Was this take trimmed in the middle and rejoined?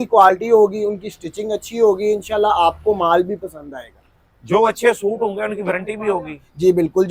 no; 0 cuts

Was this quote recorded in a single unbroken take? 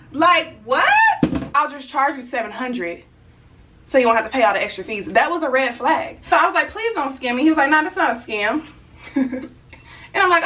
no; 2 cuts; at 1.6 s, 6.2 s

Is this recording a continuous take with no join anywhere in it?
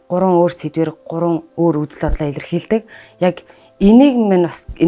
yes; 0 cuts

